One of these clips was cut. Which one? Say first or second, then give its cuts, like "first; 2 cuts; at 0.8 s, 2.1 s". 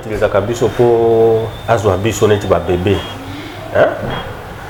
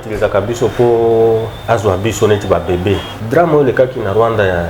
second; 1 cut; at 3.1 s